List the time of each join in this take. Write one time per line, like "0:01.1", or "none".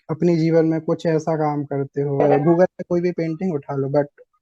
0:02.2